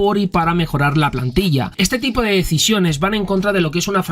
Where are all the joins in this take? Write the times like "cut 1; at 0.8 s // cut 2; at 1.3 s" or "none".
cut 1; at 1.7 s